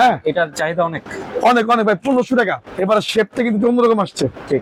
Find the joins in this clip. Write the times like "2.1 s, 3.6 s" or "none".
none